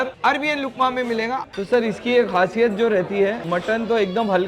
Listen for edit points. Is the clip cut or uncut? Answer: cut